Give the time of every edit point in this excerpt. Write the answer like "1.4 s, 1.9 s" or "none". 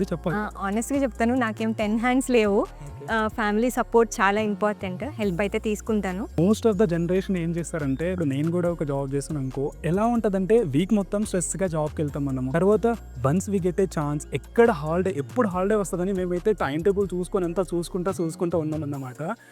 6.4 s